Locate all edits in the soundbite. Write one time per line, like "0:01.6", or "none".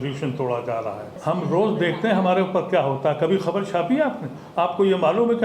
0:01.1